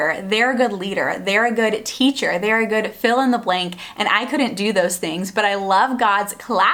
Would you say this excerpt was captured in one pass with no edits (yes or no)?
yes